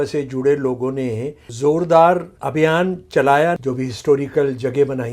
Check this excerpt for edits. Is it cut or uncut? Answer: cut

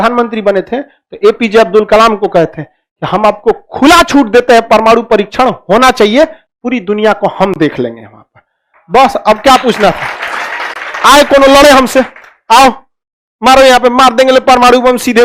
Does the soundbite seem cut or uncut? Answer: uncut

